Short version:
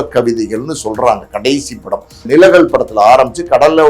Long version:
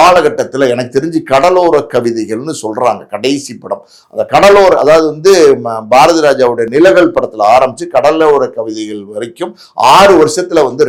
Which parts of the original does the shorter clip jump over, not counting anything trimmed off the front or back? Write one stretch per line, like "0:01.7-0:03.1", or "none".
0:04.0-0:06.6